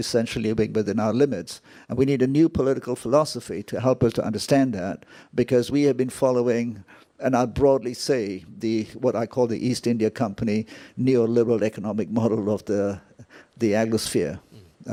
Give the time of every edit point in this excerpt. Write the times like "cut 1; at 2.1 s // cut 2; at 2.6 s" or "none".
none